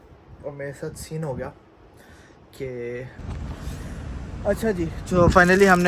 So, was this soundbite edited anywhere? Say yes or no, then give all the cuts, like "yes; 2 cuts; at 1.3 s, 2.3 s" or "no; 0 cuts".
yes; 1 cut; at 3.2 s